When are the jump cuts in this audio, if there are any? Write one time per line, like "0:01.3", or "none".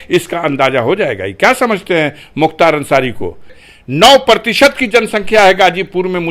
0:03.5